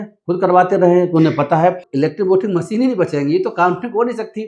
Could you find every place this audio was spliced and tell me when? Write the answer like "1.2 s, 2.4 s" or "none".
1.9 s